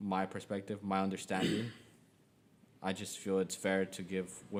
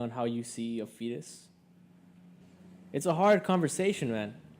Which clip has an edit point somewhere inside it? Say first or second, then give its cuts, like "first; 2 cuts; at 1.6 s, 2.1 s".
second; 1 cut; at 2.4 s